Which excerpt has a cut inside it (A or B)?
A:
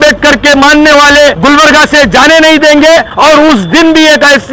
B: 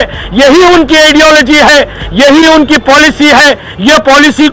A